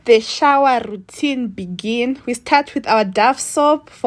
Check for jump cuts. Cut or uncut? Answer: uncut